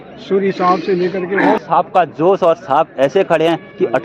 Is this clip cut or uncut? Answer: cut